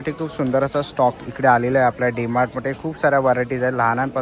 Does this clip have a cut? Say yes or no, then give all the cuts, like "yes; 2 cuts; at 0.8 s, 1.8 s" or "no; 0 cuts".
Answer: no; 0 cuts